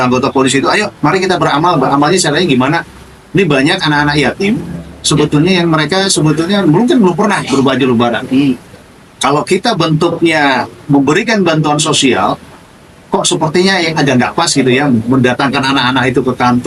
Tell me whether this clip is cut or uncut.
uncut